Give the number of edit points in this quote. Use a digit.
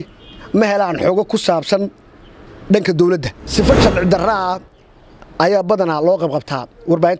1